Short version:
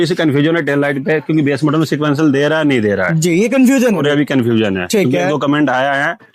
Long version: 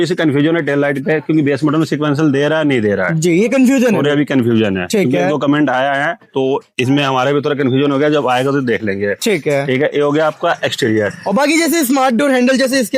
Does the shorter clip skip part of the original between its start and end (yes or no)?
no